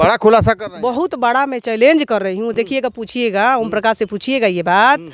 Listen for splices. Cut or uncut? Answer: uncut